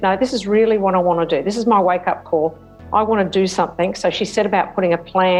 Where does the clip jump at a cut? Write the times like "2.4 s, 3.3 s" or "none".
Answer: none